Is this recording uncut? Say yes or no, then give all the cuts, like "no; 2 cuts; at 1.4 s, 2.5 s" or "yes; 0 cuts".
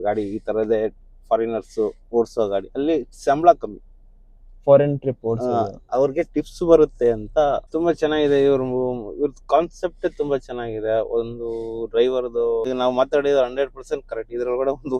no; 2 cuts; at 7.7 s, 12.7 s